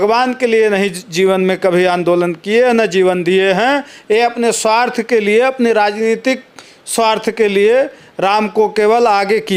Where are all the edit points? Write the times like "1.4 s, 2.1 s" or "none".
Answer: none